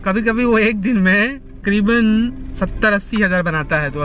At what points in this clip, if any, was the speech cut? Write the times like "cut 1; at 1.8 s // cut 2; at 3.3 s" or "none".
cut 1; at 1.5 s